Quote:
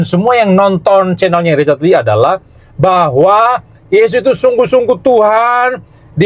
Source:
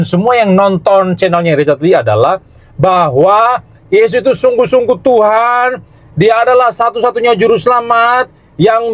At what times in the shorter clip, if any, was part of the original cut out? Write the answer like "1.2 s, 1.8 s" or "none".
none